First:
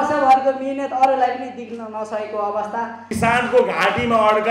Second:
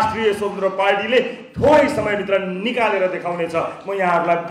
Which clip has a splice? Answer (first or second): first